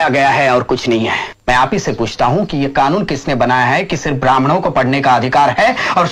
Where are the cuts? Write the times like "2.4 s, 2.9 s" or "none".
1.3 s

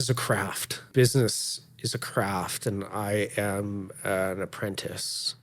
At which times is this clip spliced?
0.9 s

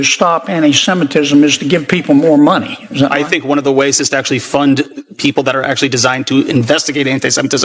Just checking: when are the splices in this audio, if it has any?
2.7 s

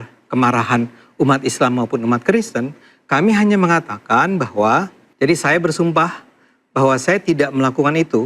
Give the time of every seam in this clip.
5.0 s

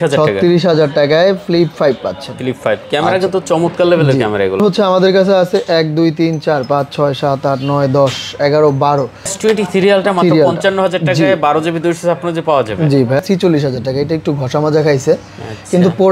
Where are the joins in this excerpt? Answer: 4.6 s, 9.3 s, 13.2 s

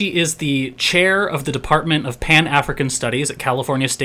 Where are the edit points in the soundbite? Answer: none

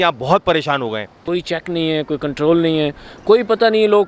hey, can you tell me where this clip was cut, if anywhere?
1.2 s

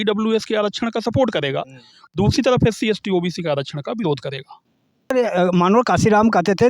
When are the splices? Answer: 5.1 s

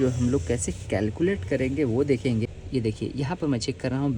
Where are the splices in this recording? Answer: 2.5 s

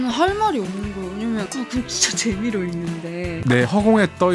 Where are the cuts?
1.5 s, 3.3 s

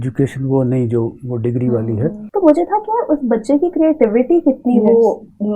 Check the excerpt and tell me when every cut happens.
2.2 s

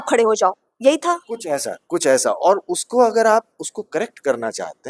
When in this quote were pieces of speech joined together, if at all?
none

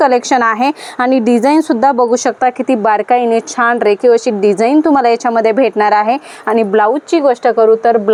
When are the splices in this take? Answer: none

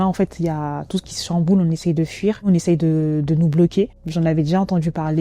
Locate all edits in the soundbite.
2.5 s, 4.0 s

